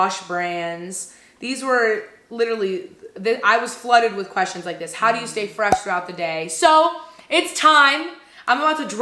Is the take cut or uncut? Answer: uncut